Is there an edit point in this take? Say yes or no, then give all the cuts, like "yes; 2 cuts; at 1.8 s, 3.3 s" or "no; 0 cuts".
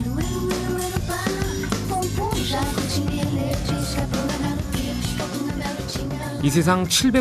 no; 0 cuts